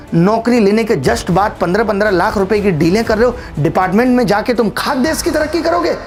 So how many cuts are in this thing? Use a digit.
0